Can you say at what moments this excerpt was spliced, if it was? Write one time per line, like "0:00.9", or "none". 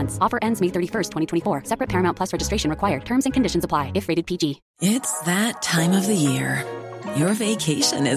0:04.7